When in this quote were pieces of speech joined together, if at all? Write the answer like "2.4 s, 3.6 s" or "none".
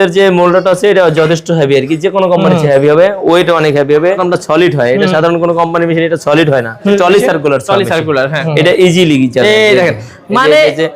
4.2 s, 6.8 s, 8.4 s